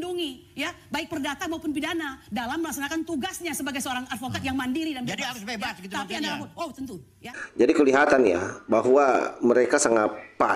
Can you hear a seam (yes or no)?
no